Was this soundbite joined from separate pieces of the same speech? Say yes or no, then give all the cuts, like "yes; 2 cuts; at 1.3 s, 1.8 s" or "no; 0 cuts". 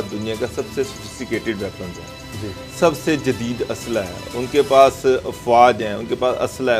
no; 0 cuts